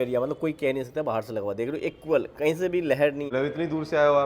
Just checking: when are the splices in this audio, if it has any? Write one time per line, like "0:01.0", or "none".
0:03.3